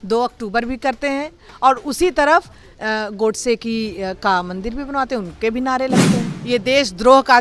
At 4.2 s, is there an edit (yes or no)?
no